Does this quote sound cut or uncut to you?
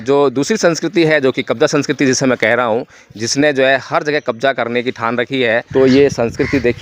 cut